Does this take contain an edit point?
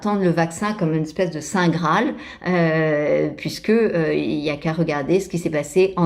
no; 0 cuts

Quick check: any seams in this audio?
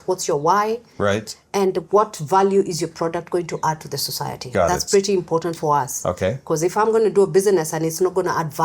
no; 0 cuts

